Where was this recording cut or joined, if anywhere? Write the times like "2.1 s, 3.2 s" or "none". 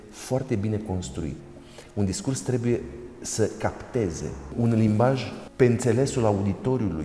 1.4 s, 4.4 s, 5.4 s